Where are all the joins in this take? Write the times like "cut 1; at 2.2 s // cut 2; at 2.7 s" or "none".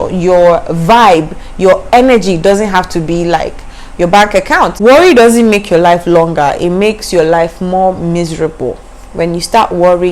cut 1; at 4.8 s